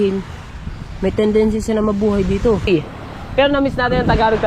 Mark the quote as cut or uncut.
cut